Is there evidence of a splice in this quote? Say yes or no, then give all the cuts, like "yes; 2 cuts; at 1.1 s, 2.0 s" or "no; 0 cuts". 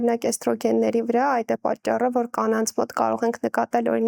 no; 0 cuts